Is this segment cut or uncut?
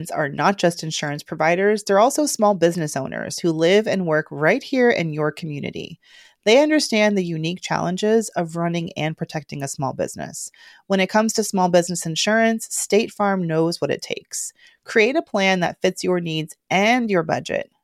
uncut